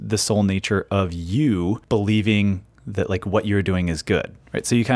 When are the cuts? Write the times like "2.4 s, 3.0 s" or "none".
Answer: 1.8 s